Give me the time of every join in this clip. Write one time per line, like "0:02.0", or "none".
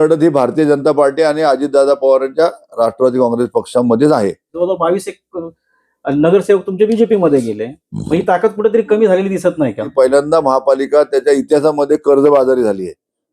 0:04.5
0:09.9